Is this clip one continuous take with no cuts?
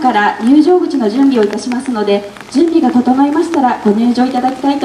no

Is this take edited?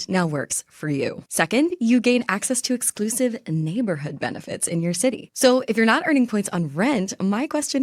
yes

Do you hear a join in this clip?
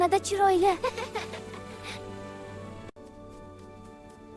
no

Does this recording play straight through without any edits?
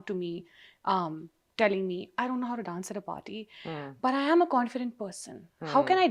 yes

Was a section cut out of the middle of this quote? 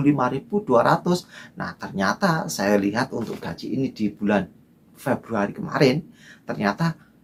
no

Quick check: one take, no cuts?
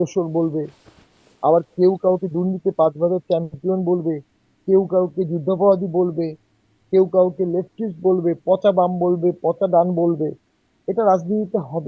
yes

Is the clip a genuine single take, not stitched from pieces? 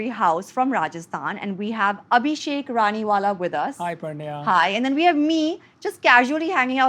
yes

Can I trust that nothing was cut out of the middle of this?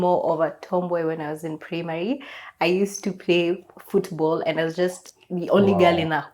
yes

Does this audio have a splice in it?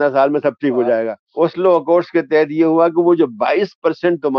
yes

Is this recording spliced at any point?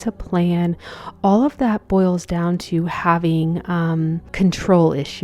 yes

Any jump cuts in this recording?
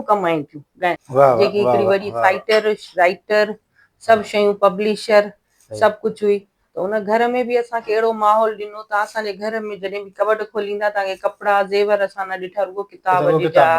yes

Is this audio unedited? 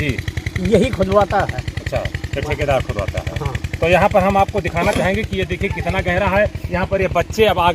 yes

